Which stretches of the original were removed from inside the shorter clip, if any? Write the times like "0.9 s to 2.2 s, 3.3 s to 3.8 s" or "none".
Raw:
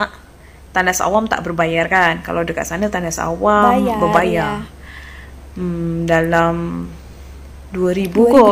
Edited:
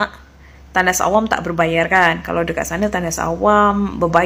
none